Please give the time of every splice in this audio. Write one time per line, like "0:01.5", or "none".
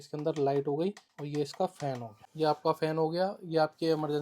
0:01.1
0:02.2